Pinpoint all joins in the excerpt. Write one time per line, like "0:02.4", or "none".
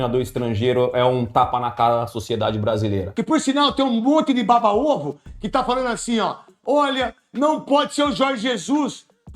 0:03.1